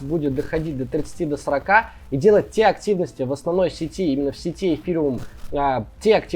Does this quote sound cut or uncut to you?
uncut